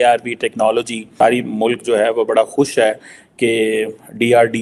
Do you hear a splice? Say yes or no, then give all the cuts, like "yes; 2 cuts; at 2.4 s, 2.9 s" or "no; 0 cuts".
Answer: yes; 1 cut; at 1.0 s